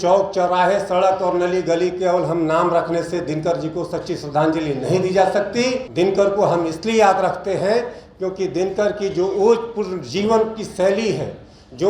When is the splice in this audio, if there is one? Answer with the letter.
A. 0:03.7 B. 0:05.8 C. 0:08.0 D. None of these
B